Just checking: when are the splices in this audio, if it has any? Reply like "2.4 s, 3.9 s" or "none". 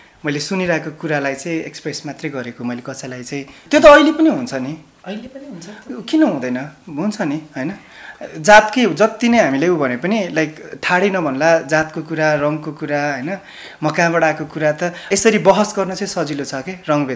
3.6 s, 15.0 s